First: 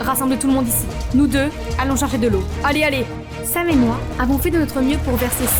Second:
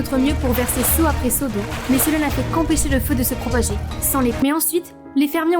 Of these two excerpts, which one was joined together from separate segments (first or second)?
second